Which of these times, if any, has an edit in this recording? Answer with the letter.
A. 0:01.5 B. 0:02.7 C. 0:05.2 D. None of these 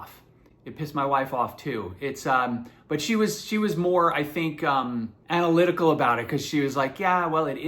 C